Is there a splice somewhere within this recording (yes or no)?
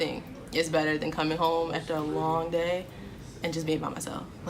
no